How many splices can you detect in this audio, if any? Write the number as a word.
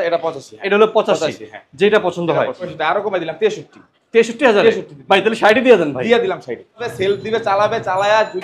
two